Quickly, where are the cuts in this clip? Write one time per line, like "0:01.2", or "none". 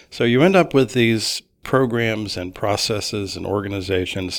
0:01.6